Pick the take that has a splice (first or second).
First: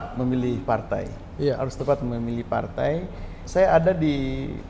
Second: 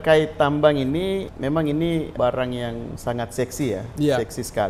first